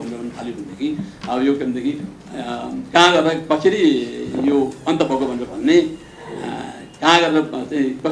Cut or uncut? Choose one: uncut